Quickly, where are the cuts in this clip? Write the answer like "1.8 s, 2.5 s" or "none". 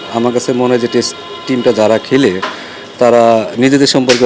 none